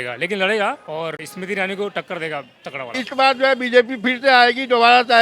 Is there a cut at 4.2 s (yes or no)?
no